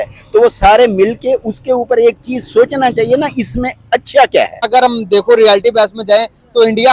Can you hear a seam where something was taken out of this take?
yes; 1 cut; at 4.6 s

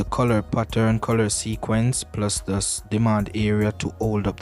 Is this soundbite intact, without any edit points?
yes; 0 cuts

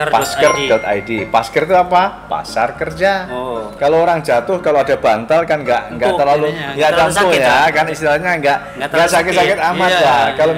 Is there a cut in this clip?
yes; 1 cut; at 3.7 s

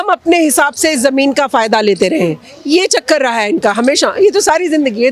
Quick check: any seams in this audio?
no; 0 cuts

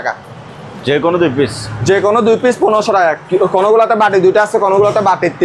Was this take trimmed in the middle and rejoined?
no; 0 cuts

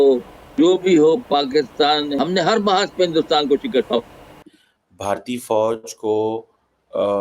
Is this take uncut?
no; 1 cut; at 2.1 s

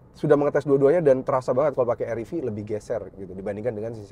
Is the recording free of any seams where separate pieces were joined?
yes; 0 cuts

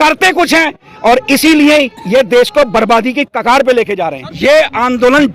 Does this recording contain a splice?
yes; 1 cut; at 4.2 s

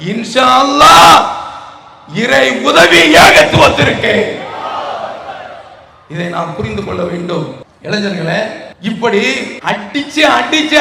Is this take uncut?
no; 3 cuts; at 7.7 s, 8.7 s, 9.5 s

